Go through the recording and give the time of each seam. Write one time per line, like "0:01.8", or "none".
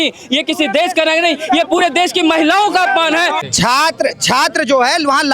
0:03.4